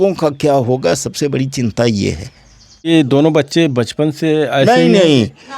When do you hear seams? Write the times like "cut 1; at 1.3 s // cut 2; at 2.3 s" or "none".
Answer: cut 1; at 2.9 s